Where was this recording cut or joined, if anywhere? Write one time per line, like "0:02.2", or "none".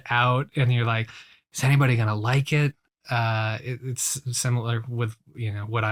none